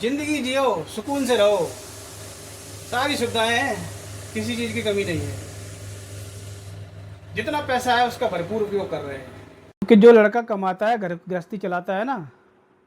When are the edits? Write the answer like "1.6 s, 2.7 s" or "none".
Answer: 9.8 s